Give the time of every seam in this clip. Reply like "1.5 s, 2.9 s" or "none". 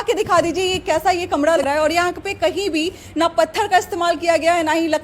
1.6 s